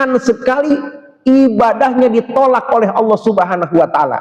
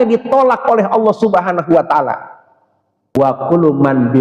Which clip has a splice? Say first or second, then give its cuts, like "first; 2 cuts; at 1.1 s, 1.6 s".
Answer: second; 1 cut; at 3.2 s